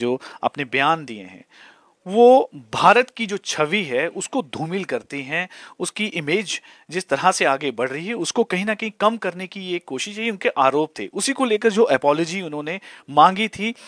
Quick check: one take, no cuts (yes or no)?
yes